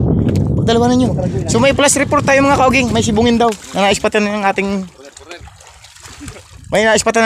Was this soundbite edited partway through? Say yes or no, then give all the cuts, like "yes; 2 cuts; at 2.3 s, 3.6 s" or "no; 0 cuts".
no; 0 cuts